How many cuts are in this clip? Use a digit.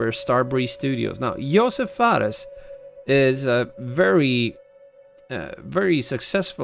0